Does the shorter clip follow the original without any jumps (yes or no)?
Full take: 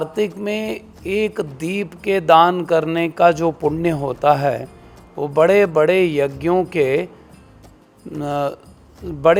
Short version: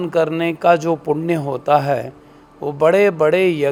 yes